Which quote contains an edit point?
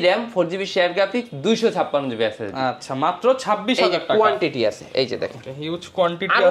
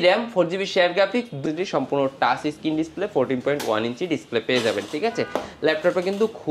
second; 1 cut; at 1.4 s

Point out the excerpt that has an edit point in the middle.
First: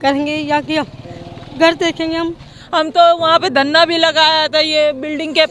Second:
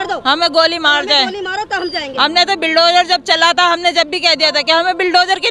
first; 1 cut; at 2.5 s

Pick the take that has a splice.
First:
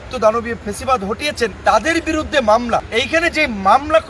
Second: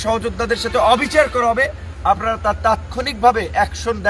first; 2 cuts; at 1.6 s, 2.9 s

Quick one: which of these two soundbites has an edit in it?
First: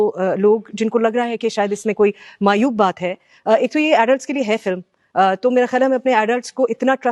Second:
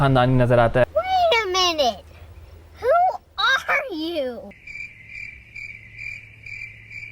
second; 1 cut; at 4.5 s

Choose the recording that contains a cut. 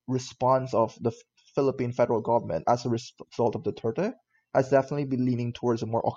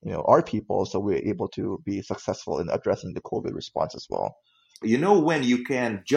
second; 1 cut; at 4.8 s

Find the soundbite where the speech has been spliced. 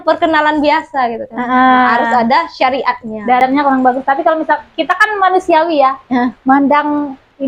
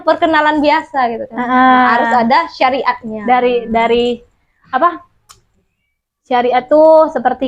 first; 1 cut; at 3.4 s

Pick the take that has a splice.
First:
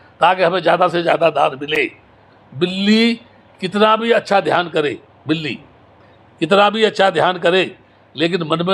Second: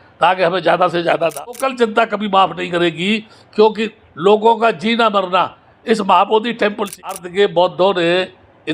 second; 2 cuts; at 1.6 s, 7.1 s

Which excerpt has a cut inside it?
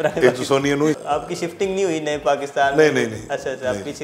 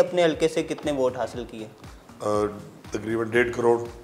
first; 1 cut; at 1.0 s

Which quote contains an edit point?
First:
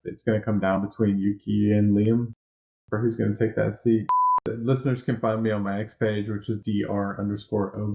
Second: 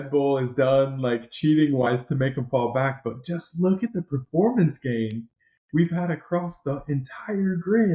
first; 2 cuts; at 4.3 s, 6.6 s

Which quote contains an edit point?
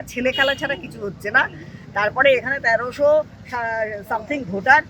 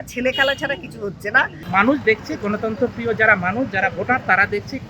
second; 1 cut; at 1.6 s

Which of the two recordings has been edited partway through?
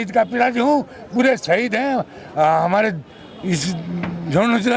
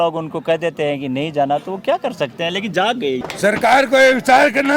second; 1 cut; at 3.3 s

